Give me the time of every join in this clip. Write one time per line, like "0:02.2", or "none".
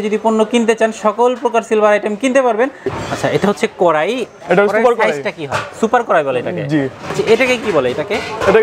0:02.9
0:07.2